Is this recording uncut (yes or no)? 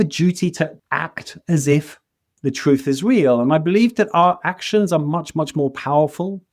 yes